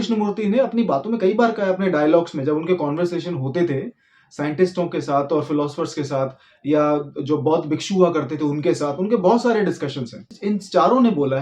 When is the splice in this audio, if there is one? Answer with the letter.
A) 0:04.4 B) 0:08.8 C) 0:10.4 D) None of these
C